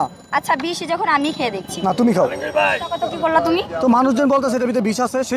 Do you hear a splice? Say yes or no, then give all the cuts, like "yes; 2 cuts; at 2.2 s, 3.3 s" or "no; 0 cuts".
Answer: yes; 1 cut; at 3.0 s